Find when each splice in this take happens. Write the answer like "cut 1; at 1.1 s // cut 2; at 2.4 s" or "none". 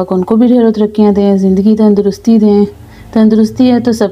none